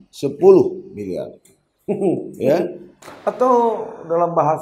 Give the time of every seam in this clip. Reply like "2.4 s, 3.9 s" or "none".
2.8 s